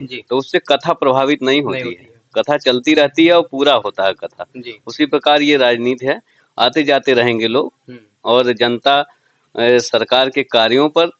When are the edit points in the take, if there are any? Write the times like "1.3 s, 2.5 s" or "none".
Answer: none